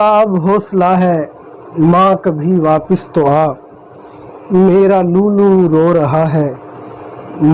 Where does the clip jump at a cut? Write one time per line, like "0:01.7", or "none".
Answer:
none